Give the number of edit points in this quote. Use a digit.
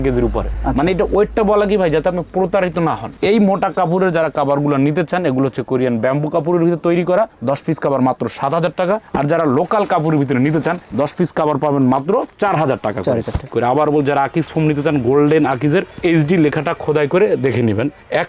2